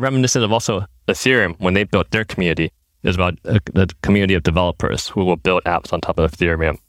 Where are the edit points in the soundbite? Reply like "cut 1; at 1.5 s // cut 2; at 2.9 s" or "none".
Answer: none